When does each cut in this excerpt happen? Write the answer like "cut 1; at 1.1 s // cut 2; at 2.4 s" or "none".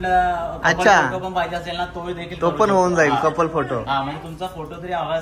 none